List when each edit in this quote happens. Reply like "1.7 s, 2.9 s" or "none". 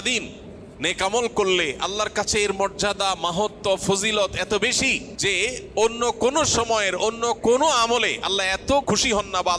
5.1 s, 8.8 s